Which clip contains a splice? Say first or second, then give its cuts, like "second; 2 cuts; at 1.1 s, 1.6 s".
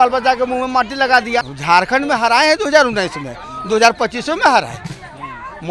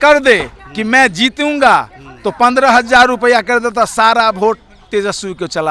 first; 1 cut; at 1.5 s